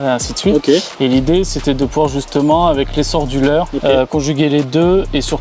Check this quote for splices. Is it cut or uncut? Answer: cut